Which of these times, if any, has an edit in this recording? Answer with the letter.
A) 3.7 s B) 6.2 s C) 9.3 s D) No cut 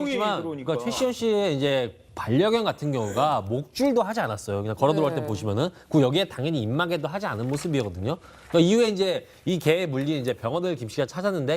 B